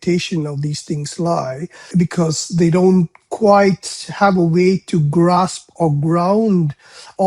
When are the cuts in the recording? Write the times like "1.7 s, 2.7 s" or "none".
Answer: 1.8 s